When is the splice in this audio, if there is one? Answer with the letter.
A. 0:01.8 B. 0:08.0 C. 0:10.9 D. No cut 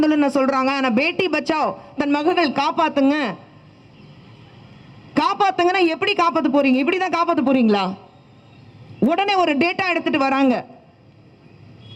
D